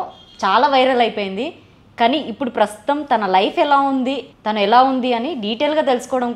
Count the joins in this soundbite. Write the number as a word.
one